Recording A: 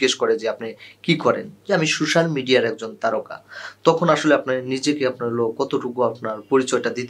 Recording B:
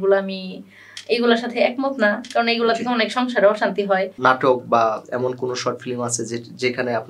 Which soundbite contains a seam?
B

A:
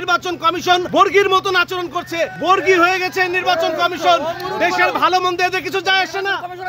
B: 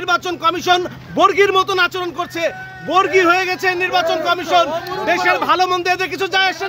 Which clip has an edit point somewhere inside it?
A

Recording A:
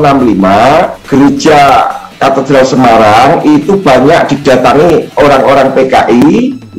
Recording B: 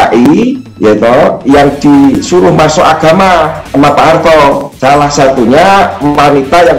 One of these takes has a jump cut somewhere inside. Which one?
B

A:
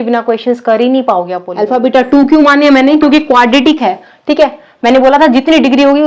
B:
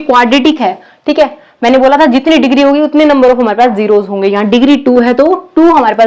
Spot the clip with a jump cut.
A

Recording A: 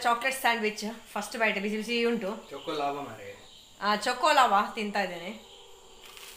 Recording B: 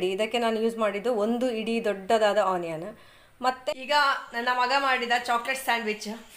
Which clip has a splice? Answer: B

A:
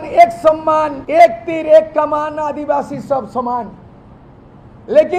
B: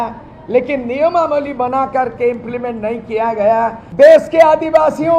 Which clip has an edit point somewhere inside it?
B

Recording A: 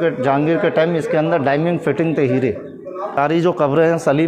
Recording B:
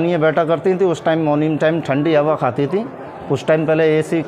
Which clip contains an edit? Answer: A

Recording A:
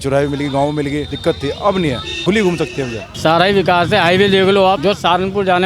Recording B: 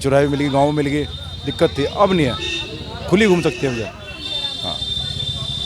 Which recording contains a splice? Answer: A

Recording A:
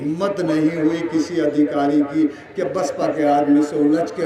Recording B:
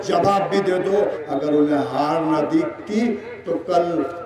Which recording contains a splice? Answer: B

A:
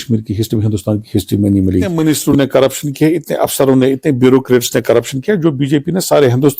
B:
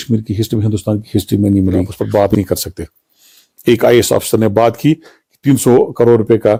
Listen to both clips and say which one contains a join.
A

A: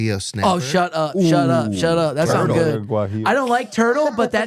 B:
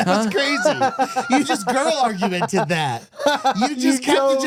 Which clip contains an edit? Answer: A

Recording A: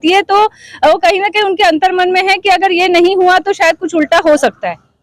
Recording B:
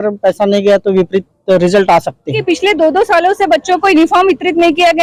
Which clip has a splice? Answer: B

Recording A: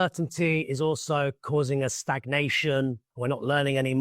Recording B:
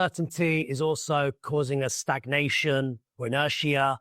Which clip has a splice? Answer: A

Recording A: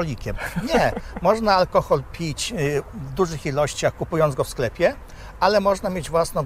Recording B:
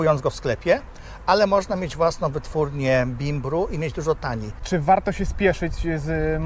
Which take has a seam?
B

